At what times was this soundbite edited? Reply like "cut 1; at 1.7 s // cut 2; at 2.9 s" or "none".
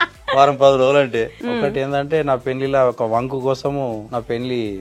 cut 1; at 1.4 s // cut 2; at 4.0 s